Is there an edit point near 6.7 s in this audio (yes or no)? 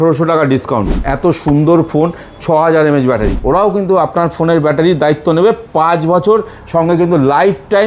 no